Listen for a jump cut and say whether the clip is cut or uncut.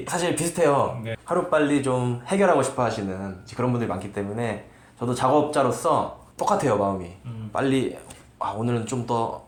uncut